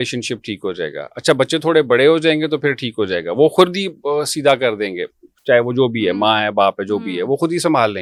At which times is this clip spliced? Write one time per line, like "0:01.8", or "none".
none